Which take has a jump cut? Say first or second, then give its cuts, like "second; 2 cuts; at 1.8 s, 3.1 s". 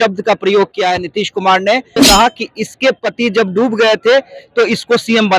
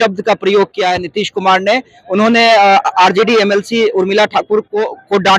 first; 1 cut; at 2.0 s